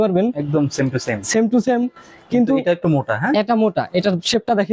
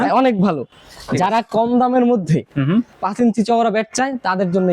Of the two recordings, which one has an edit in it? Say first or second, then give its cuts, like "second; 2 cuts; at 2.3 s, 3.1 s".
second; 1 cut; at 3.0 s